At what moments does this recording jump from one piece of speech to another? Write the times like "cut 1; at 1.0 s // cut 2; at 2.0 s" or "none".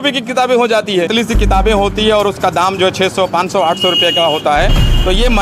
cut 1; at 1.1 s